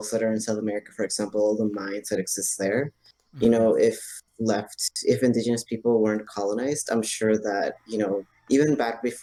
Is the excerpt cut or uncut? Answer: uncut